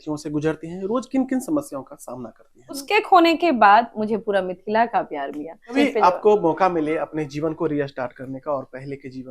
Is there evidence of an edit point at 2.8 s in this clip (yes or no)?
yes